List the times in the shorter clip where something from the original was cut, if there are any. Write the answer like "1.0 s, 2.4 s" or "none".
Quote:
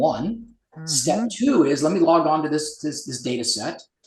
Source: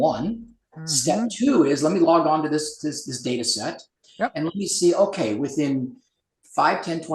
none